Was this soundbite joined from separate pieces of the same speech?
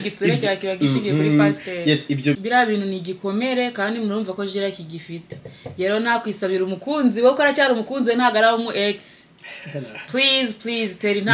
yes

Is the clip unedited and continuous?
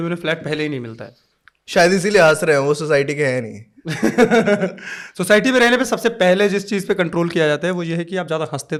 yes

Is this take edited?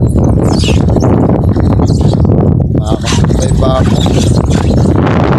no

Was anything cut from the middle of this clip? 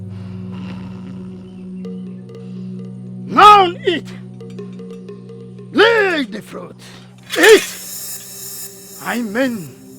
yes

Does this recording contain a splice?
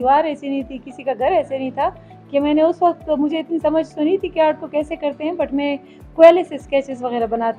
no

